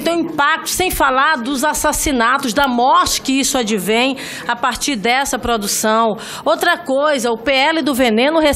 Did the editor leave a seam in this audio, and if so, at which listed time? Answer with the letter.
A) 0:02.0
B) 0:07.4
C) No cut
C